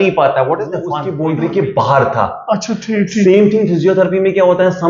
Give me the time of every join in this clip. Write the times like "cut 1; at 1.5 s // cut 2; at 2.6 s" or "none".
cut 1; at 1.1 s